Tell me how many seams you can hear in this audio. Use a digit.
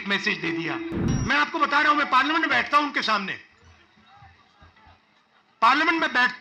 1